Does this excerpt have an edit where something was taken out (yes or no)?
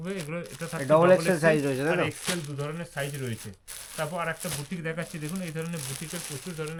no